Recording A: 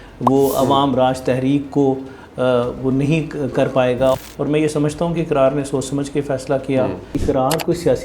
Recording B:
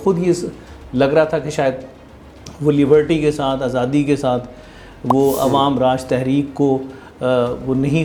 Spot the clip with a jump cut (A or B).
A